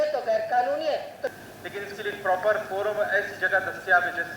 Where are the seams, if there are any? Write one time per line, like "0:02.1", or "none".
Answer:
0:01.2